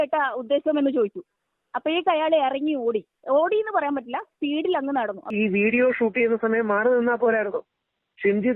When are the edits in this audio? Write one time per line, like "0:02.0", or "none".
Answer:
0:05.3